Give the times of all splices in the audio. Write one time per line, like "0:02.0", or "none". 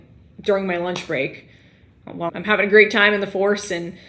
0:02.3